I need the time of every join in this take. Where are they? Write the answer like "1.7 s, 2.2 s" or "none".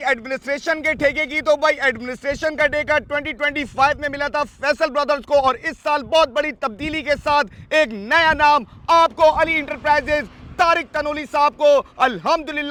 none